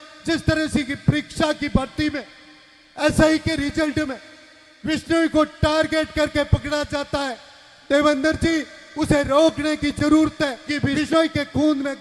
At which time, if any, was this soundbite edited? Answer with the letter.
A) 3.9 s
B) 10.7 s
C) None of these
B